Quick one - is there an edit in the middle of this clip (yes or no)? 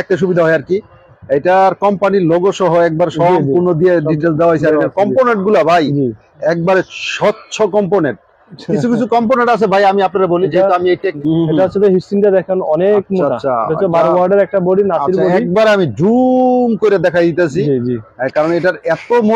yes